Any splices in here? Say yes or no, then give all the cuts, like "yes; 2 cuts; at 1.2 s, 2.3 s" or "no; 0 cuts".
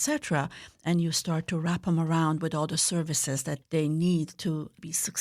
yes; 1 cut; at 3.5 s